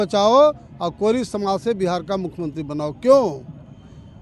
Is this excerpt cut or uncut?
uncut